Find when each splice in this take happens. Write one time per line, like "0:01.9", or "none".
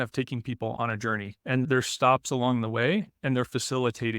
0:01.6